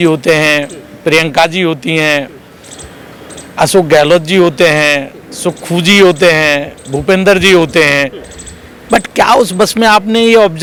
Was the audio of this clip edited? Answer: no; 0 cuts

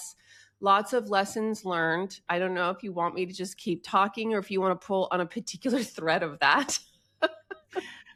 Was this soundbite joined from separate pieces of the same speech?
no; 0 cuts

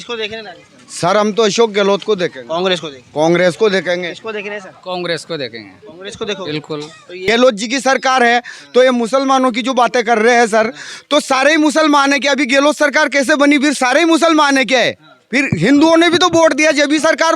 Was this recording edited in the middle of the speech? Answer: yes; 1 cut; at 7.1 s

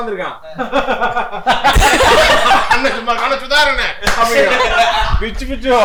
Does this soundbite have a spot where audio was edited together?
no; 0 cuts

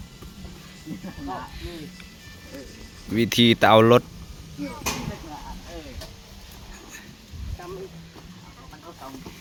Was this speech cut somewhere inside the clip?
no; 0 cuts

